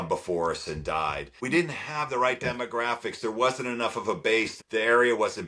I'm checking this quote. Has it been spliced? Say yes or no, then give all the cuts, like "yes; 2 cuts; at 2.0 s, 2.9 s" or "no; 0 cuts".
yes; 2 cuts; at 1.4 s, 4.5 s